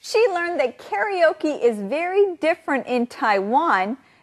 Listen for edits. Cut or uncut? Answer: cut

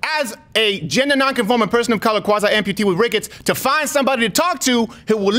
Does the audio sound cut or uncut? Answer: uncut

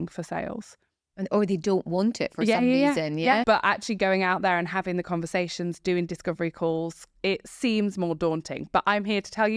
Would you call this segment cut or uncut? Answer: cut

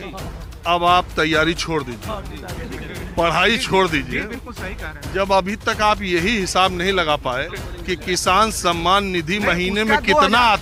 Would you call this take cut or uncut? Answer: uncut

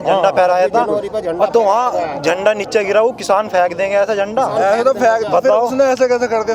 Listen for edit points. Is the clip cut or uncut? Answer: uncut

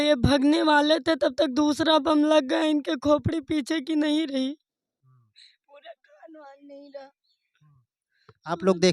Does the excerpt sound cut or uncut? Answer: uncut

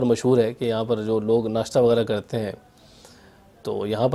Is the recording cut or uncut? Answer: uncut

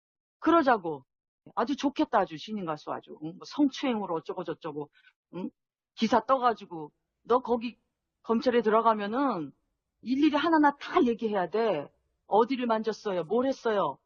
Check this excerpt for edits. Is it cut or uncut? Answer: uncut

